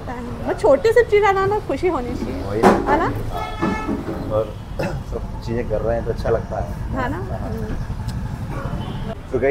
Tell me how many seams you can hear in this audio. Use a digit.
0